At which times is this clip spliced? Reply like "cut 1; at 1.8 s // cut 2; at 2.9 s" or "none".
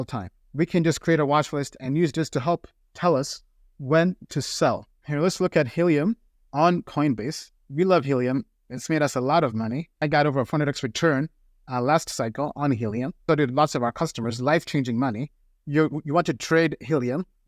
none

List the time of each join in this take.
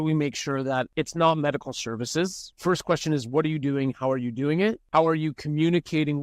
cut 1; at 0.9 s // cut 2; at 2.5 s // cut 3; at 4.8 s

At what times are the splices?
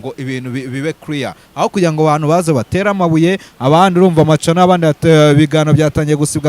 none

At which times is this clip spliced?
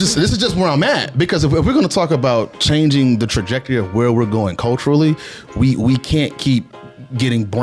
none

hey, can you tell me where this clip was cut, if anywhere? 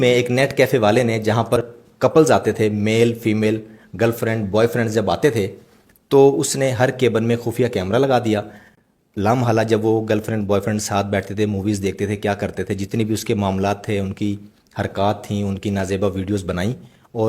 cut 1; at 1.6 s

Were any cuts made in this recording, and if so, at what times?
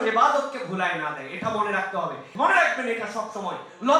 cut 1; at 2.2 s

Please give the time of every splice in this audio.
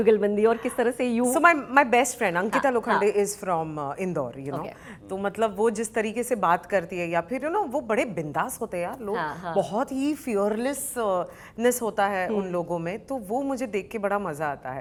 none

